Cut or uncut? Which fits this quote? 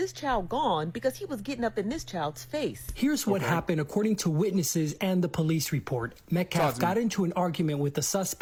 uncut